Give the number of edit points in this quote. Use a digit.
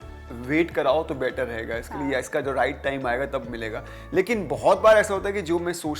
0